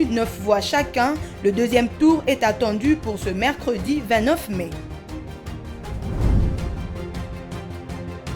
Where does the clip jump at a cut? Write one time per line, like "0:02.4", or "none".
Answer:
none